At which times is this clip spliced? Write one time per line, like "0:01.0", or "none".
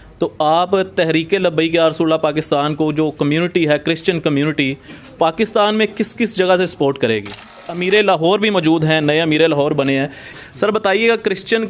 0:07.7
0:10.4